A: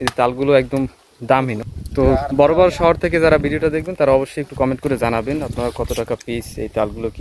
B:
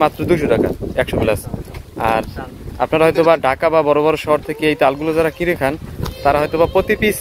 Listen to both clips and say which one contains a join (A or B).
A